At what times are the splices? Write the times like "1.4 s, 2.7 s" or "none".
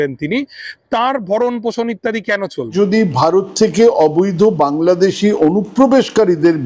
2.7 s